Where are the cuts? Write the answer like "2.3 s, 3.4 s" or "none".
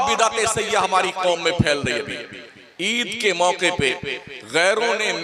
none